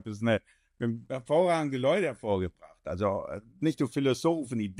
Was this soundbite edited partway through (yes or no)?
no